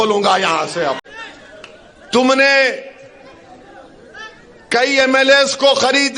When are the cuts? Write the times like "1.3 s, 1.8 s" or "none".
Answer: 1.0 s